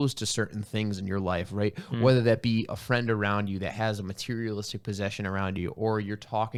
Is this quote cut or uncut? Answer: uncut